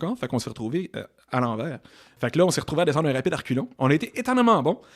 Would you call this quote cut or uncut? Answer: cut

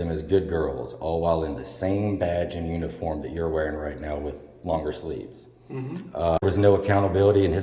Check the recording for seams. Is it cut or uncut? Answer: cut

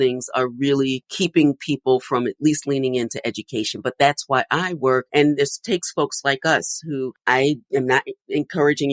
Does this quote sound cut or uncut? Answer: cut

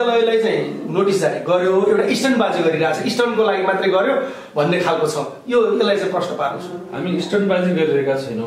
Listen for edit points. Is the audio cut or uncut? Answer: uncut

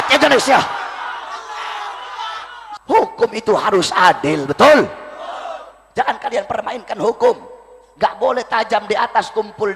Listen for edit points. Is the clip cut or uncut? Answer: cut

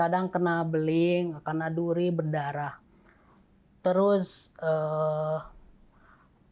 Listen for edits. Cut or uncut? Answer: uncut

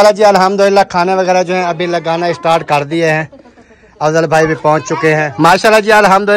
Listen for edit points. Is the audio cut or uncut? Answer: cut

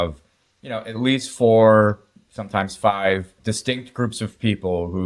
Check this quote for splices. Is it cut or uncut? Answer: cut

